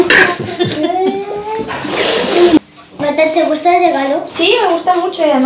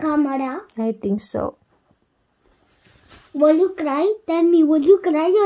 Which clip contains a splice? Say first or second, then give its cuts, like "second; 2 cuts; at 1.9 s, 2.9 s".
first; 1 cut; at 2.6 s